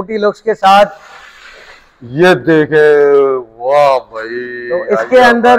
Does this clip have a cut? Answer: no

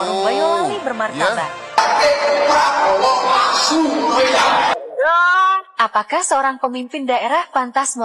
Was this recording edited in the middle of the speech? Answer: no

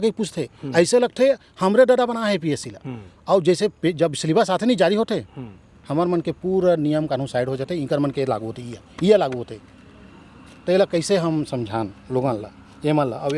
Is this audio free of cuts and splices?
yes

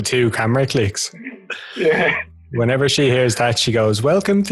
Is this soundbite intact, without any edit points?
yes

